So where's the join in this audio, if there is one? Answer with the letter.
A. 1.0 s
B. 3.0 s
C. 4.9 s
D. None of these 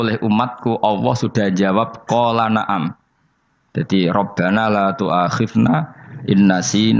D